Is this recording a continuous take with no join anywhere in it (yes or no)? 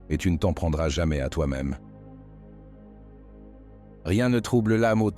no